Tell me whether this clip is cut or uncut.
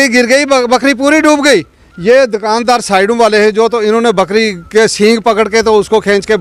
uncut